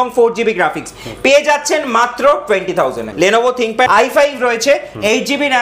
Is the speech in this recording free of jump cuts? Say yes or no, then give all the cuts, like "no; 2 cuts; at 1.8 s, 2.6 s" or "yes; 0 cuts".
no; 2 cuts; at 3.0 s, 3.9 s